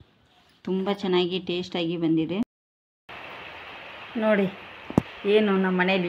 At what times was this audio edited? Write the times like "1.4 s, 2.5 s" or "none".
2.5 s